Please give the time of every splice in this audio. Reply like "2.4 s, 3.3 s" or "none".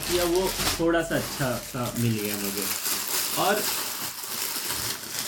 none